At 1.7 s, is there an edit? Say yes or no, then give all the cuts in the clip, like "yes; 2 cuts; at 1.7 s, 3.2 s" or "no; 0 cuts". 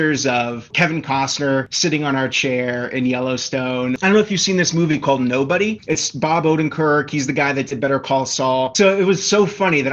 yes; 2 cuts; at 1.7 s, 4.0 s